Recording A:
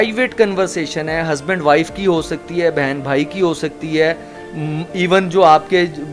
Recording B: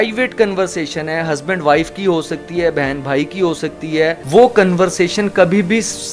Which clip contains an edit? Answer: B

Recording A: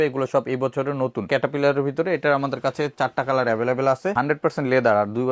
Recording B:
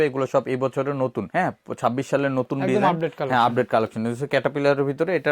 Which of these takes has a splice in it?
A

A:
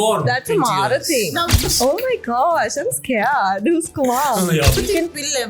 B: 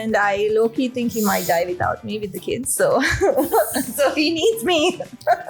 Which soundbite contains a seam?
A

